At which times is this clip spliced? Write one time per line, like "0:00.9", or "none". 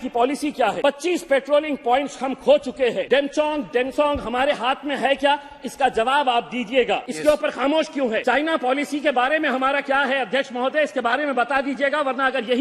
0:00.8
0:03.0
0:07.1
0:08.2